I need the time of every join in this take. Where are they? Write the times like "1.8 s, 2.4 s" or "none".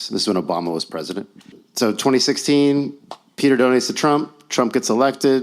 1.6 s